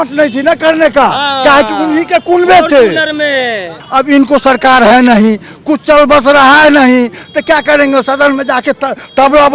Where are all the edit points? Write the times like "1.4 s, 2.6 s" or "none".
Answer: 3.7 s